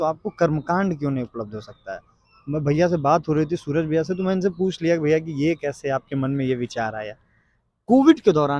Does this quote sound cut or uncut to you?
uncut